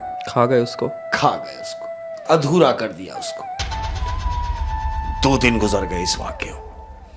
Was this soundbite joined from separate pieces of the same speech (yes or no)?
no